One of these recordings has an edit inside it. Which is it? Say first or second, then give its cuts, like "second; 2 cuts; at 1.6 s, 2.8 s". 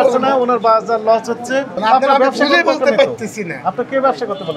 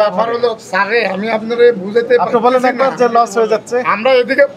first; 1 cut; at 1.7 s